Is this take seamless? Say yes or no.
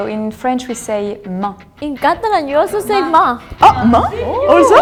yes